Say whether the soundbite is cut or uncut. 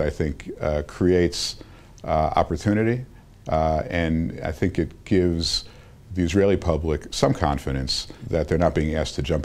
cut